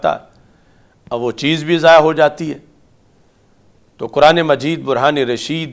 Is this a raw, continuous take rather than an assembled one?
yes; 0 cuts

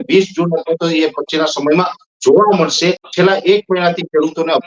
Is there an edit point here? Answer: yes; 1 cut; at 3.1 s

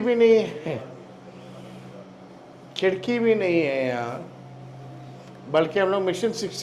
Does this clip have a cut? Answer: no; 0 cuts

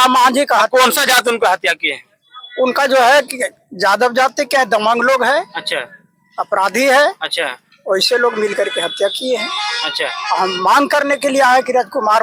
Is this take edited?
no; 0 cuts

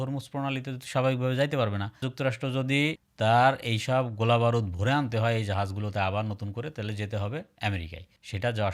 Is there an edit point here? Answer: no; 0 cuts

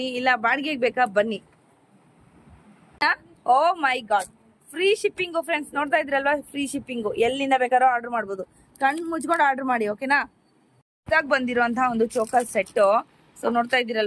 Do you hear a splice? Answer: yes; 2 cuts; at 3.0 s, 10.9 s

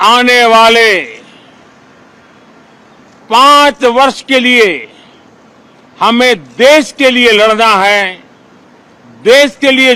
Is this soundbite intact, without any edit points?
yes; 0 cuts

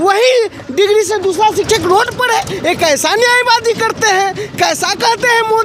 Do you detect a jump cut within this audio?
no; 0 cuts

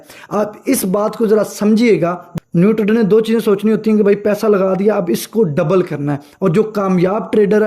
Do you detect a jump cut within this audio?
yes; 1 cut; at 2.2 s

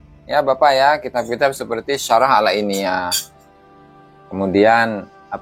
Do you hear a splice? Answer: no; 0 cuts

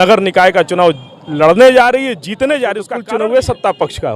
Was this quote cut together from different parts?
yes; 1 cut; at 2.8 s

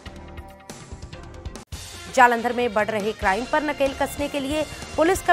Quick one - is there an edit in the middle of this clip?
yes; 1 cut; at 1.5 s

